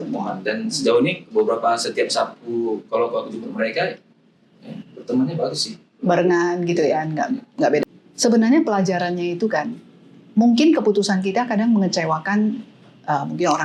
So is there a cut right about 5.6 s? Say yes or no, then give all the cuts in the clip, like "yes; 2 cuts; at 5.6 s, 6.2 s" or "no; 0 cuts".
no; 1 cut; at 7.8 s